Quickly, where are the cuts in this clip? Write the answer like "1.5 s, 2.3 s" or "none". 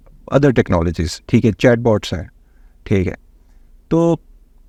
none